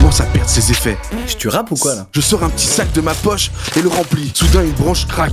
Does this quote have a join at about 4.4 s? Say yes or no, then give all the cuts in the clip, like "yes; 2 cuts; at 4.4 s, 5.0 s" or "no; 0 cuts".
no; 1 cut; at 2.0 s